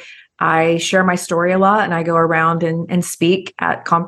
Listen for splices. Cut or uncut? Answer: uncut